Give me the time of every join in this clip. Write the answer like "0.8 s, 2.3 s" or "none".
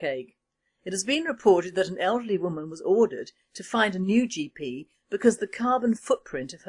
none